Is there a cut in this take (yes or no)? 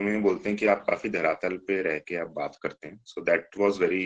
no